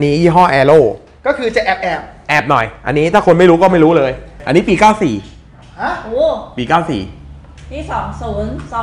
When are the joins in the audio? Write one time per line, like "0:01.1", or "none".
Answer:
0:04.4